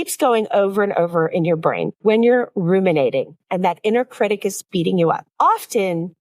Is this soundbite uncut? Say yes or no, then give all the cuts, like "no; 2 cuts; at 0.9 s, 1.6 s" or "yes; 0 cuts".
no; 1 cut; at 5.3 s